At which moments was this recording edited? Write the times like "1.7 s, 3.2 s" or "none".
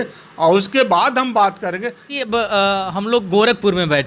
2.1 s